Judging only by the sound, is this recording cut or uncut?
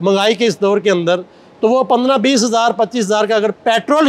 uncut